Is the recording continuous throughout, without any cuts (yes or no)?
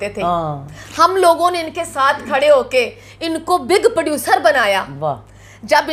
yes